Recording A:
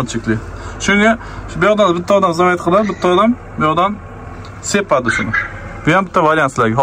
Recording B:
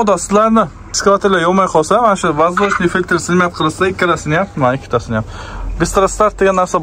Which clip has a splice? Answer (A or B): B